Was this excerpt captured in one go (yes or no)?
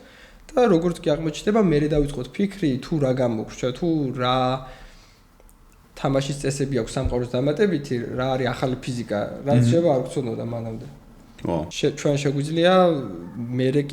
no